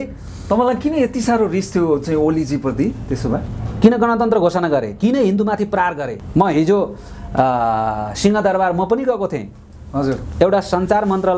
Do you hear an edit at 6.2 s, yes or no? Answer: no